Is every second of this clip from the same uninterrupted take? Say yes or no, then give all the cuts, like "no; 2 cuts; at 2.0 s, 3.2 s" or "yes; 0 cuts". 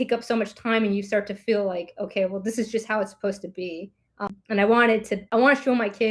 no; 2 cuts; at 4.3 s, 5.2 s